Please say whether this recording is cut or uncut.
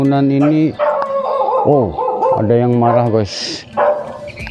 uncut